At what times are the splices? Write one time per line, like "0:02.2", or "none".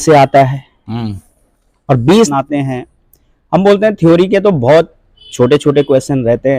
0:02.3